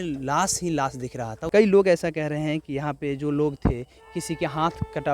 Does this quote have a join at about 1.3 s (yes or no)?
yes